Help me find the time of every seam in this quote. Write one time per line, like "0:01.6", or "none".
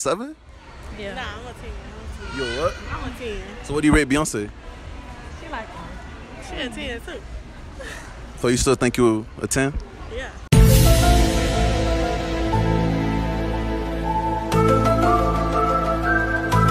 none